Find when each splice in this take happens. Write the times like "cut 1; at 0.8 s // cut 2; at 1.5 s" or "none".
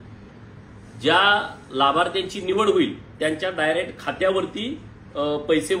none